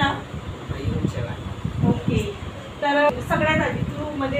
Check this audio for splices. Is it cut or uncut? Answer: cut